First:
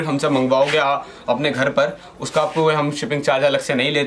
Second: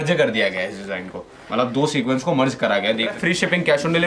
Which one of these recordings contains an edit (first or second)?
second